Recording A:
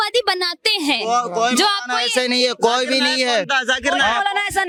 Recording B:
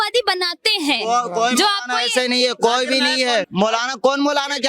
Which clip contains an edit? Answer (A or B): B